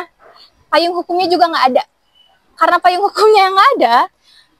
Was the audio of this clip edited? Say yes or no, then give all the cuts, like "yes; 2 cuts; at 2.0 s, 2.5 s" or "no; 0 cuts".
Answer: no; 0 cuts